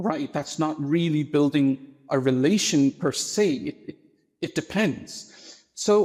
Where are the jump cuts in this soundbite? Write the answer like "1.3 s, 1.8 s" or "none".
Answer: none